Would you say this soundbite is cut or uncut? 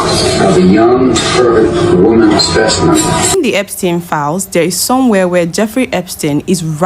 cut